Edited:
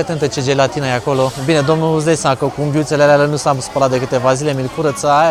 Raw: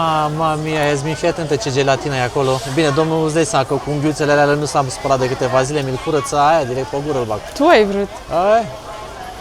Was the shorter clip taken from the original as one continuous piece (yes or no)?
yes